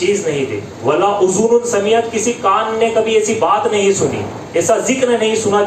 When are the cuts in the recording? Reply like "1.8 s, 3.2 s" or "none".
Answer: none